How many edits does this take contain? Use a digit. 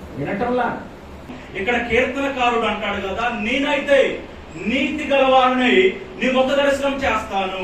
1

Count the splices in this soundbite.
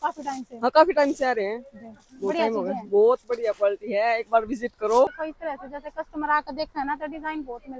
1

